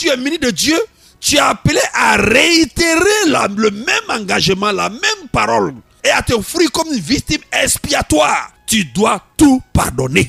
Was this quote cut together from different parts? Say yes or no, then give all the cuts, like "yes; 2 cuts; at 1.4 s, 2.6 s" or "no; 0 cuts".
yes; 2 cuts; at 5.9 s, 8.5 s